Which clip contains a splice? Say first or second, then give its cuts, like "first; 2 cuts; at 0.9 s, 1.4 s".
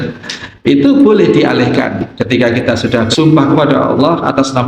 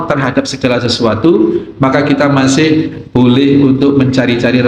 first; 2 cuts; at 2.1 s, 3.1 s